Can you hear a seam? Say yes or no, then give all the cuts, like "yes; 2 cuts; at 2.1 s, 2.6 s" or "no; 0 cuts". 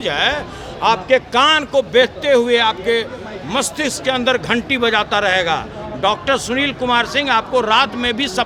no; 0 cuts